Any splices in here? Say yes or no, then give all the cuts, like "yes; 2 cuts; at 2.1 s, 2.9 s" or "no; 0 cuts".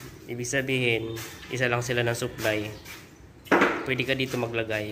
no; 0 cuts